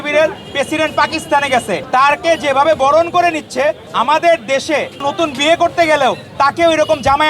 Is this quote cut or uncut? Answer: cut